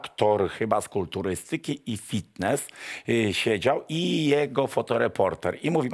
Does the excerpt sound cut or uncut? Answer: uncut